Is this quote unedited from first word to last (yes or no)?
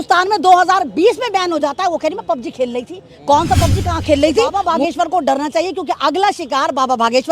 no